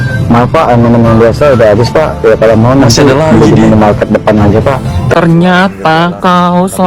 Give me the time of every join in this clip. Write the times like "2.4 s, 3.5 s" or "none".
5.1 s